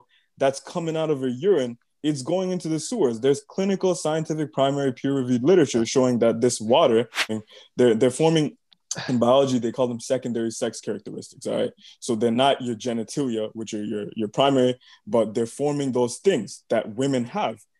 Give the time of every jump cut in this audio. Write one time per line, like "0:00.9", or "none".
0:07.4